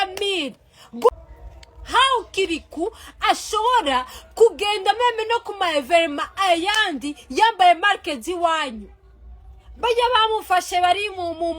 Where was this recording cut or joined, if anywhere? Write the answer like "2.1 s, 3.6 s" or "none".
1.1 s